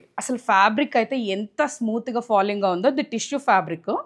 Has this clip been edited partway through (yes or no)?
no